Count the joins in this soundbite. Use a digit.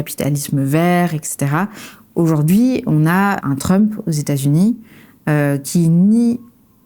1